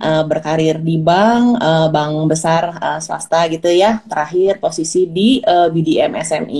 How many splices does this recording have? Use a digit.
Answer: 0